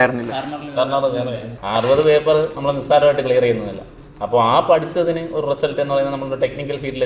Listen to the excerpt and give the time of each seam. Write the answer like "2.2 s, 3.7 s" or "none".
1.5 s